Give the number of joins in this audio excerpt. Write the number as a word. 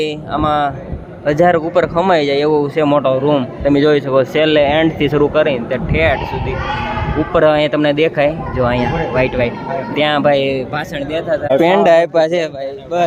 one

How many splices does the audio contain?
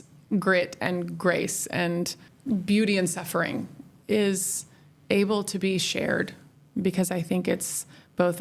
one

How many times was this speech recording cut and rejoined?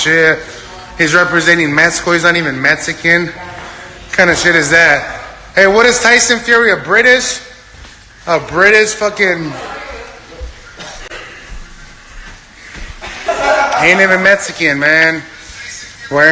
one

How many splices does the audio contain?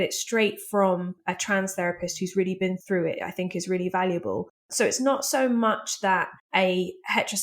four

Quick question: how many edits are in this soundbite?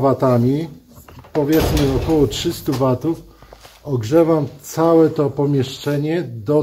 zero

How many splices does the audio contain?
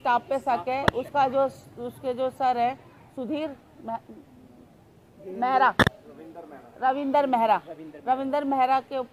zero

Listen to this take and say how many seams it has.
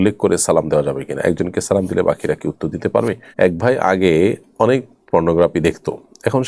one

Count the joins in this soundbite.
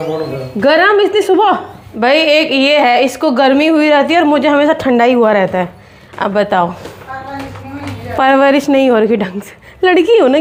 zero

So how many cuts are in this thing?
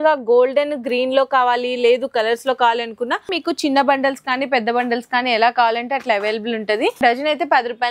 two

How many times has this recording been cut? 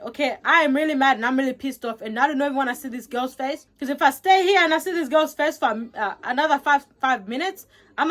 one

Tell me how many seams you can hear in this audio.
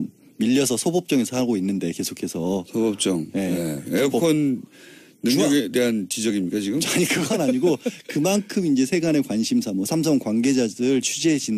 one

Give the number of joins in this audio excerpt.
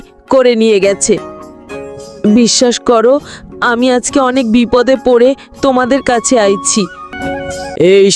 one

